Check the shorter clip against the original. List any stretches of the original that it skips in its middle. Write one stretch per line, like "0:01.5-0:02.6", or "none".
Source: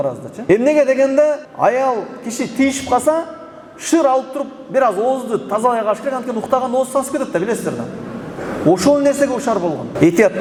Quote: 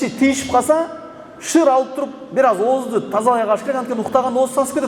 none